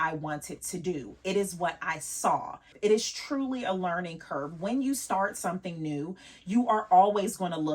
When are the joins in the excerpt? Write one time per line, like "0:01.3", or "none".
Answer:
0:02.6